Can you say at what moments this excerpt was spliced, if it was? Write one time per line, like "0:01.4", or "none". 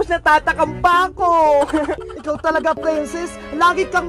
0:02.1